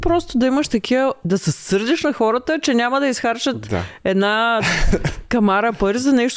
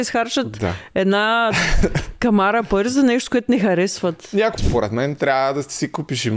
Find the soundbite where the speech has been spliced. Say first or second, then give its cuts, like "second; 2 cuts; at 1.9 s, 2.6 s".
second; 1 cut; at 4.6 s